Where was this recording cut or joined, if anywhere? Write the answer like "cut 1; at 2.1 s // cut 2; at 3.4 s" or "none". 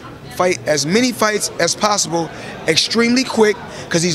none